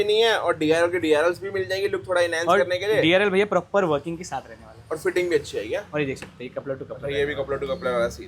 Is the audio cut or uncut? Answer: uncut